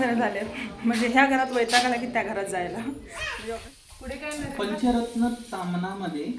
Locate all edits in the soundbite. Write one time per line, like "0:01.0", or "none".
0:03.3